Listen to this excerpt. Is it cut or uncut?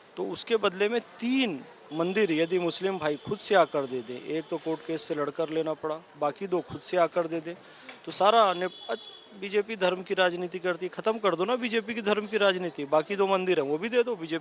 uncut